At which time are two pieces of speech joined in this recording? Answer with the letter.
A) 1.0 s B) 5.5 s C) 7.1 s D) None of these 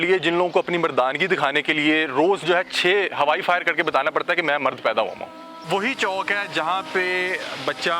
B